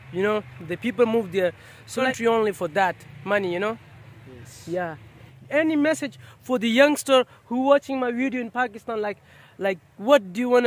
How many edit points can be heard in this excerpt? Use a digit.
2